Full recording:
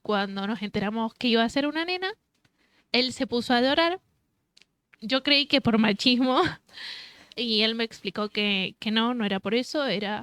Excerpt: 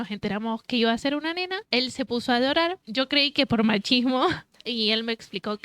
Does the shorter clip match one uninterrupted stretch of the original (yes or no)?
no